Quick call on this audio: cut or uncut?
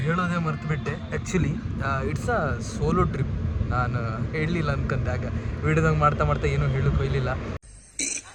uncut